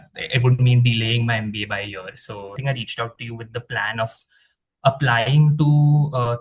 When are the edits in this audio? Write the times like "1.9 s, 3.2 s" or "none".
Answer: 2.6 s